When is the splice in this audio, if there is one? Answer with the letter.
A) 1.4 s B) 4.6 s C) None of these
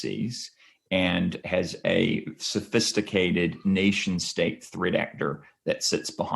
A